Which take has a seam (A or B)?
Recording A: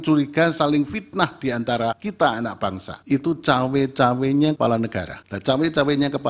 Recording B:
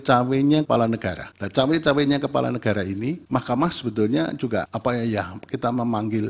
A